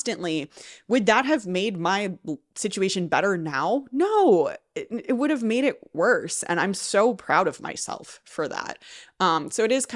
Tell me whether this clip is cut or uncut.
uncut